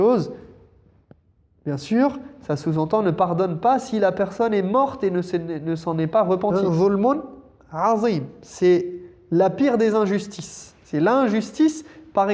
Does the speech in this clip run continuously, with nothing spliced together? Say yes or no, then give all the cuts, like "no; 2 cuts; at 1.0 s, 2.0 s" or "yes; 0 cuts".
no; 1 cut; at 6.5 s